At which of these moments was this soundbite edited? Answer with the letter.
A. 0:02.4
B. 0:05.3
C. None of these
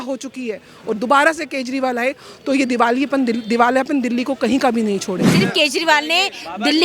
B